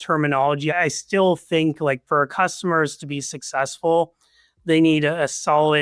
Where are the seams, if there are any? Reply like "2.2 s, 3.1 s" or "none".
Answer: 0.7 s, 2.0 s

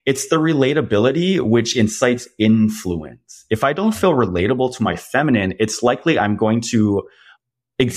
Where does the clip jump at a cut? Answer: none

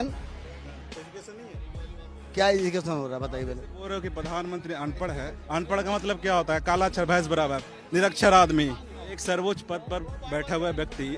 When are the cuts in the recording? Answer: 5.3 s, 9.1 s

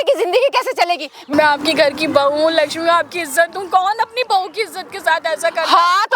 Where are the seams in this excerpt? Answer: 1.2 s

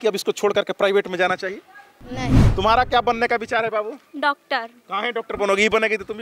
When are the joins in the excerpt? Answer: 2.4 s

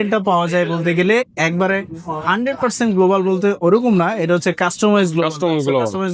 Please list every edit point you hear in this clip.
none

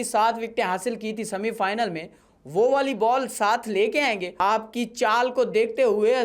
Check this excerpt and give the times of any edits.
4.3 s

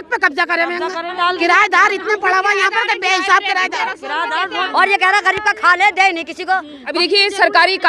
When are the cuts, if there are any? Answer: 1.2 s, 4.6 s, 6.8 s

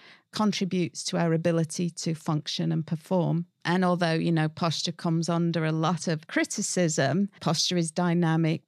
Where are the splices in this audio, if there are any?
3.5 s, 6.2 s, 7.4 s

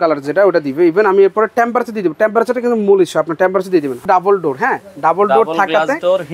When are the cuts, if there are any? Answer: 4.0 s

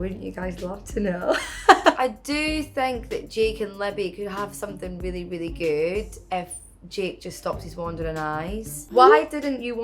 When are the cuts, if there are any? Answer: 2.0 s, 8.9 s

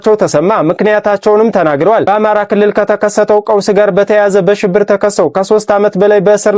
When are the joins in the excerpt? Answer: none

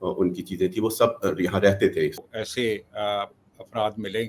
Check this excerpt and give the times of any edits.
2.2 s

